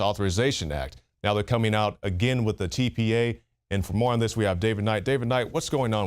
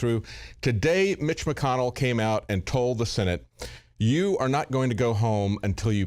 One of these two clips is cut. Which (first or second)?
first